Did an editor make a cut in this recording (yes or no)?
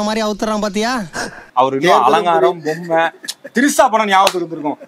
yes